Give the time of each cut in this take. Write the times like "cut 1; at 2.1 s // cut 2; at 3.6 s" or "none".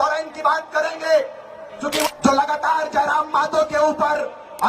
cut 1; at 2.0 s